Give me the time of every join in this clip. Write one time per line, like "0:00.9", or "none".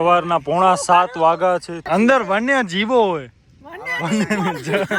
0:01.7

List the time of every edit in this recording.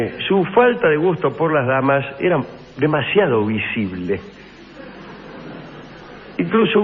0:04.6

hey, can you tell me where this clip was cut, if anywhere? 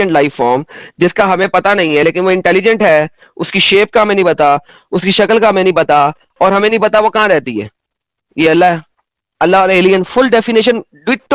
none

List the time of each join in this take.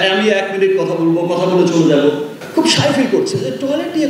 0:02.3

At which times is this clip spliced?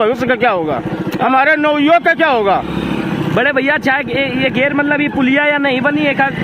none

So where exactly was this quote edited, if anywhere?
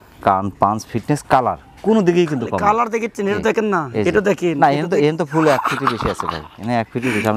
none

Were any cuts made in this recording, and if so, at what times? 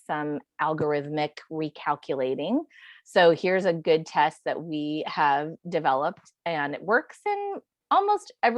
none

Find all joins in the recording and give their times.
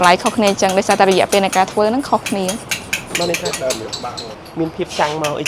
0:04.2

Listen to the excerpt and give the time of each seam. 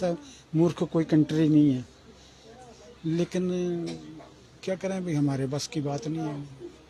none

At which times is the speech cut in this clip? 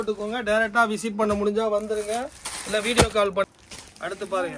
0:03.5

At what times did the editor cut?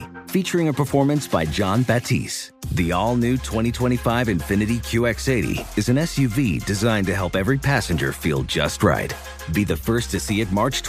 none

